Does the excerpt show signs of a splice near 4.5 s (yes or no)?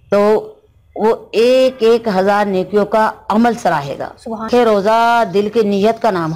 yes